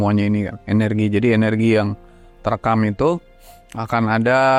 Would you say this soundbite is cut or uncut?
uncut